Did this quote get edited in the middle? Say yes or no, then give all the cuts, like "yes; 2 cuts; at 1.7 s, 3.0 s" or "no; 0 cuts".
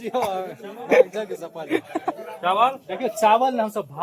yes; 1 cut; at 2.1 s